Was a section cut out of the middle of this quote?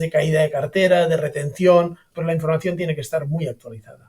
yes; 1 cut; at 2.0 s

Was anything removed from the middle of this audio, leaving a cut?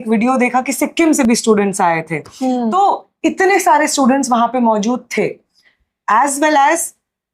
no; 0 cuts

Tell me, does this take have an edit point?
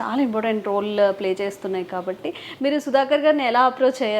no; 0 cuts

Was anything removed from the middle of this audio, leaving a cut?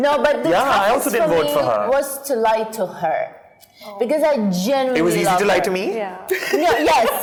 no; 0 cuts

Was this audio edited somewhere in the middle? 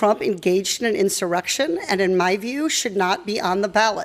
no; 0 cuts

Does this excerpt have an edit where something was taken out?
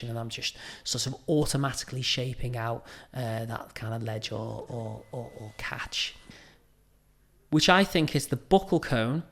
yes; 1 cut; at 6.4 s

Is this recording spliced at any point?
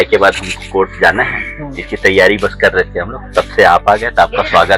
no; 0 cuts

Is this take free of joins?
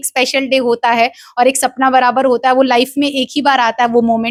yes; 0 cuts

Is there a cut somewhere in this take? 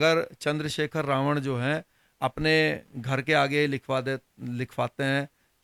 no; 0 cuts

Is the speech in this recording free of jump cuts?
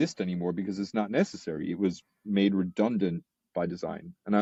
yes; 0 cuts

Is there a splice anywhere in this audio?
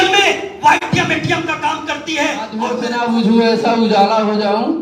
yes; 1 cut; at 2.8 s

